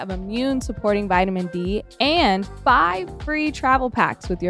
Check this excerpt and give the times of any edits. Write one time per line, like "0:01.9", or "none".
0:02.5